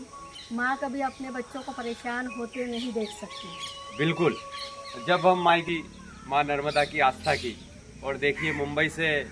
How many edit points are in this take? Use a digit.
1